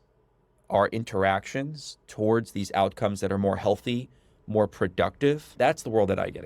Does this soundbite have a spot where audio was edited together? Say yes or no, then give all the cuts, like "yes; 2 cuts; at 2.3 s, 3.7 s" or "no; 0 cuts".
yes; 1 cut; at 5.6 s